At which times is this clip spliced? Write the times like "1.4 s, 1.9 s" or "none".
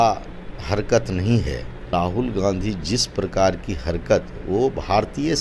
1.9 s